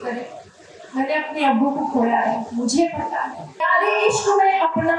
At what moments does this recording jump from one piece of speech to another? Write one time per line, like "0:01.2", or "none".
0:03.6